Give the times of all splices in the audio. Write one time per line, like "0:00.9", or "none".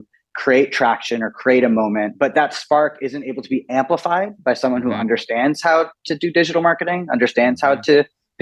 0:02.1